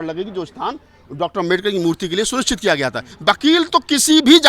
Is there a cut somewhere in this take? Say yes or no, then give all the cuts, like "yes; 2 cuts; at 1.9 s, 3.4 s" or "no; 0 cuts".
yes; 1 cut; at 3.1 s